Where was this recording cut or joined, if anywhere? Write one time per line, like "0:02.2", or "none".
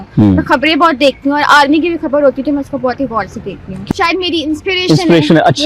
0:03.7